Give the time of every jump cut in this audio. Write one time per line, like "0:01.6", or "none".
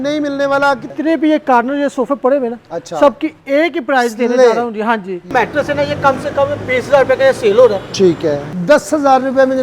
0:00.9
0:05.2
0:08.5